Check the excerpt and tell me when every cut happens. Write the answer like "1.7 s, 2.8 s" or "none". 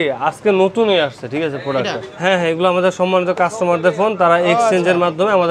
2.1 s